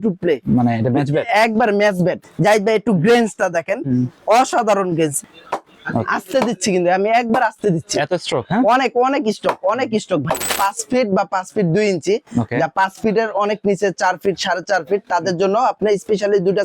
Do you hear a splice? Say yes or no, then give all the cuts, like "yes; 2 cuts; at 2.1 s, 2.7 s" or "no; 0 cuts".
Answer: yes; 3 cuts; at 2.2 s, 5.2 s, 10.5 s